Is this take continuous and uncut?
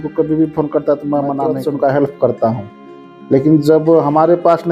no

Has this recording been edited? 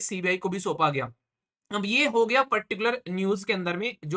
no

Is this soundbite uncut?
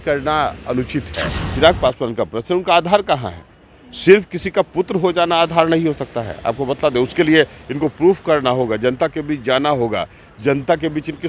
no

